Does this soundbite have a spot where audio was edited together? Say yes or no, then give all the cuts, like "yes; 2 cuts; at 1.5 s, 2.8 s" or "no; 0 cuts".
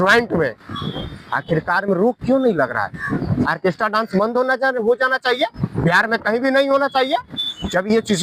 no; 0 cuts